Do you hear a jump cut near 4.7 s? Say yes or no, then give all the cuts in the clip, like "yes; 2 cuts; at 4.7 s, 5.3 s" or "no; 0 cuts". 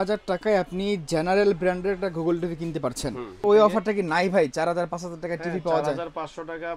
no; 1 cut; at 3.4 s